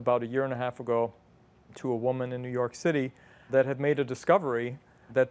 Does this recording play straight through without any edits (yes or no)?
yes